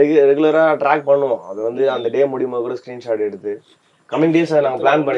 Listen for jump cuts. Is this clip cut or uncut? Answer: uncut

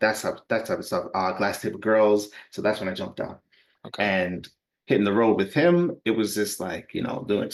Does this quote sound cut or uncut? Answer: uncut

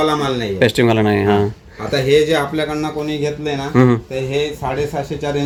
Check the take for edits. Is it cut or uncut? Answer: uncut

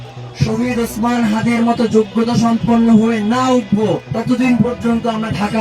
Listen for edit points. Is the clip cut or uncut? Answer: cut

